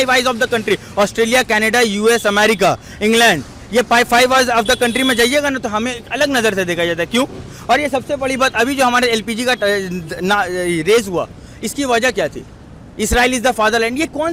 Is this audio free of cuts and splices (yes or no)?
yes